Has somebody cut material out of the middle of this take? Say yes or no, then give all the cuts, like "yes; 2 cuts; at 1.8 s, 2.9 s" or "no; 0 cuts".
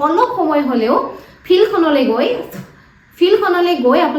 no; 0 cuts